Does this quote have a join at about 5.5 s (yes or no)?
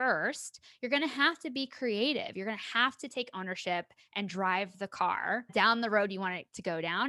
yes